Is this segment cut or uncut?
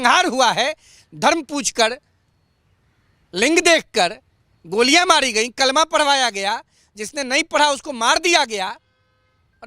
uncut